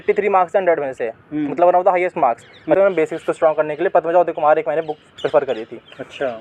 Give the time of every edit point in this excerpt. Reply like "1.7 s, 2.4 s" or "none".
2.8 s

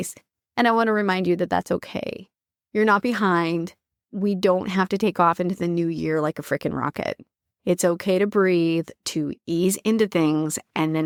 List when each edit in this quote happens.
none

